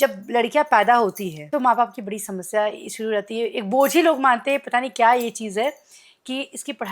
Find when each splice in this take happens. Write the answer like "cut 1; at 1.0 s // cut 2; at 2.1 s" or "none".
cut 1; at 1.3 s